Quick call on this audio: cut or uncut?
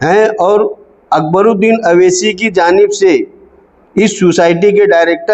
uncut